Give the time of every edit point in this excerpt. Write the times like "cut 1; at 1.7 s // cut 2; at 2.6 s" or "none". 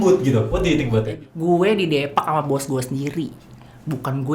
cut 1; at 1.1 s